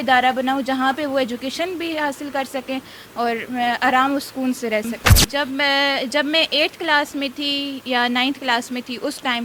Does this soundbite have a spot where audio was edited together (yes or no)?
yes